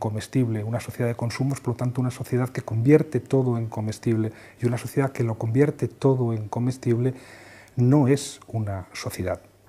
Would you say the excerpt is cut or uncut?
cut